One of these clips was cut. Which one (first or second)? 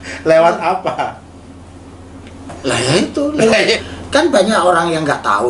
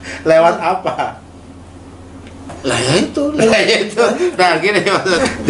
first